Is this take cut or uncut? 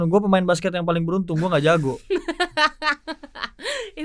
uncut